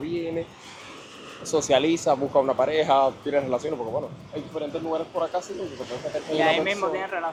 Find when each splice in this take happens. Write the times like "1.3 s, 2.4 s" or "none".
none